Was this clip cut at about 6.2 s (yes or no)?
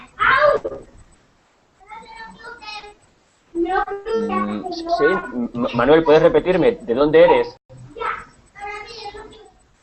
no